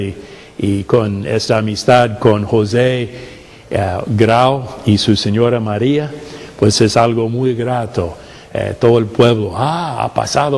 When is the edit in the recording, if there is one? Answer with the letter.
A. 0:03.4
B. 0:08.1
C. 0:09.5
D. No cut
D